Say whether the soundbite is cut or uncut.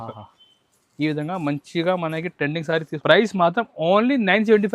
cut